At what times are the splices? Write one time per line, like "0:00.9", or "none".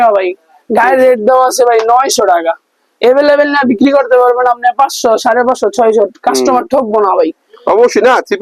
none